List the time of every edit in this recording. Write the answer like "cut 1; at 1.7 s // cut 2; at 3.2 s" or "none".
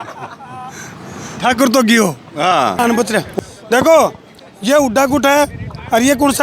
cut 1; at 2.8 s